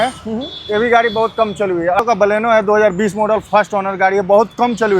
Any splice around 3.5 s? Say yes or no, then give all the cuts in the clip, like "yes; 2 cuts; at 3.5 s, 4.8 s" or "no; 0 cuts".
no; 1 cut; at 2.0 s